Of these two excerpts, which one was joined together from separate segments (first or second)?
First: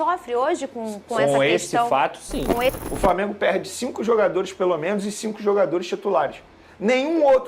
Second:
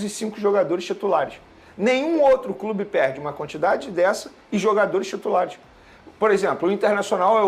first